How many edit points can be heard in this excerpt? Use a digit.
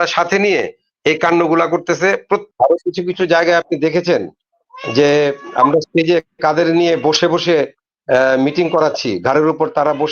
1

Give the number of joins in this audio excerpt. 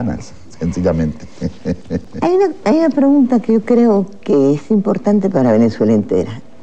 0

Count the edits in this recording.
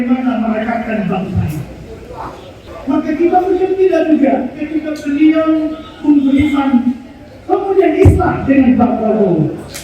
1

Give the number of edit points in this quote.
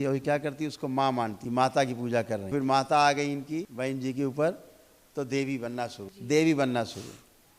4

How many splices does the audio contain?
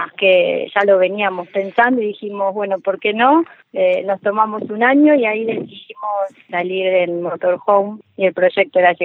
2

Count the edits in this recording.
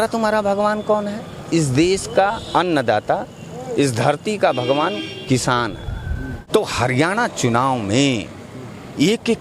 1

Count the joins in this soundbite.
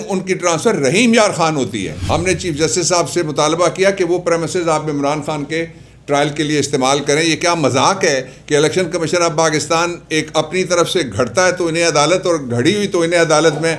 1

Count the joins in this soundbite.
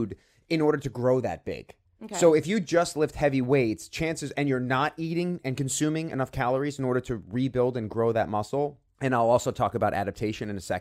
0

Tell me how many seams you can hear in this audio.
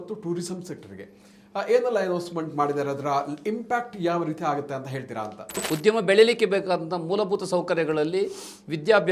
1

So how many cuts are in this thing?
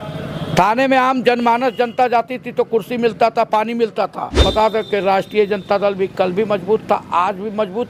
1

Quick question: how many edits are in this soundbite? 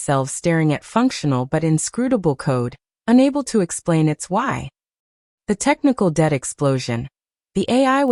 0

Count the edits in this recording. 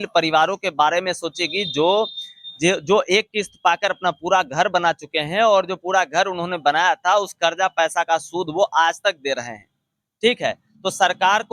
0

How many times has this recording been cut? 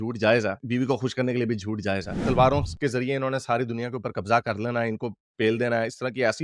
1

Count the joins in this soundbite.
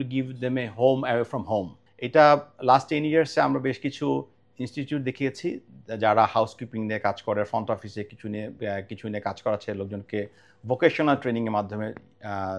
1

